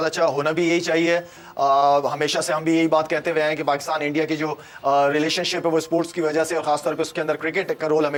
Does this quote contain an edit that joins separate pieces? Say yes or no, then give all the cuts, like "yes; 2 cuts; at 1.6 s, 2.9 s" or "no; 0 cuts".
no; 0 cuts